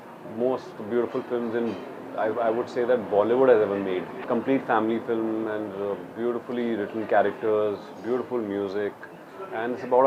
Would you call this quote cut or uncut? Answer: uncut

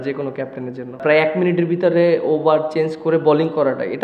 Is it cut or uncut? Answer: cut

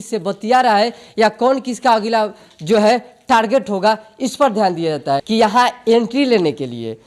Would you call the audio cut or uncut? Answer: cut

